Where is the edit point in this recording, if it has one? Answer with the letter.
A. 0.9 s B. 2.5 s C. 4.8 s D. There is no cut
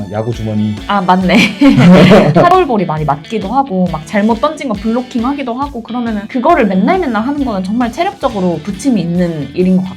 B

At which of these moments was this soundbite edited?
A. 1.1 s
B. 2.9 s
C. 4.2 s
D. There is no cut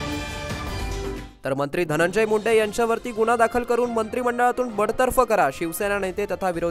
A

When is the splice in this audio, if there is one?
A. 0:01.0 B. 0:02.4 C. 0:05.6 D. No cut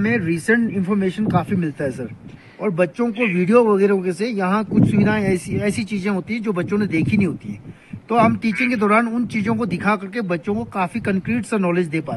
D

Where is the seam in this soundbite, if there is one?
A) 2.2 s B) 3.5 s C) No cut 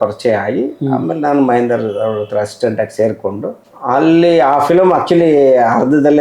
B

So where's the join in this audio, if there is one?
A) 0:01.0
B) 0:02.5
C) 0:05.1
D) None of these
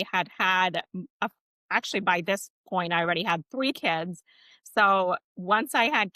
D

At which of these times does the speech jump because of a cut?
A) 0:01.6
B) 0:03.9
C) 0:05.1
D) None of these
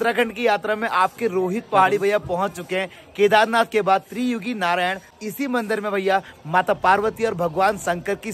C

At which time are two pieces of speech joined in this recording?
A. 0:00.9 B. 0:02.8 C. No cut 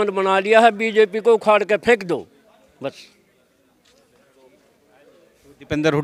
C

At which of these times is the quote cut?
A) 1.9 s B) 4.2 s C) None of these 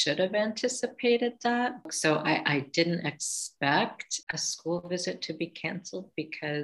A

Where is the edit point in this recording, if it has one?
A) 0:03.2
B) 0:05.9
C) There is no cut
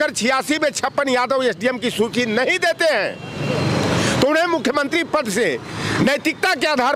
C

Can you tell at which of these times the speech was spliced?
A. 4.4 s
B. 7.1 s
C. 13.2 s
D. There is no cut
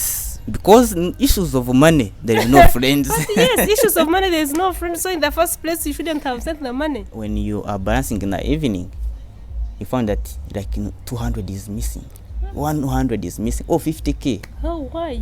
B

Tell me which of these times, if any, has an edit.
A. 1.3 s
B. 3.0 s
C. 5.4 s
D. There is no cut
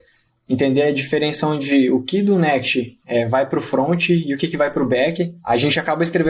C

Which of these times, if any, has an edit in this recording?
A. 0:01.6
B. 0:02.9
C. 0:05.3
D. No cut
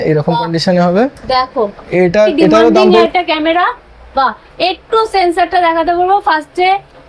B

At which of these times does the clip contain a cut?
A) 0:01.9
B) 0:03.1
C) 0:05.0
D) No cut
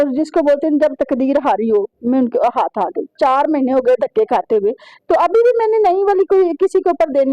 B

